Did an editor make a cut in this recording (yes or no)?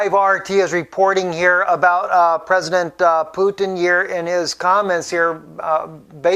no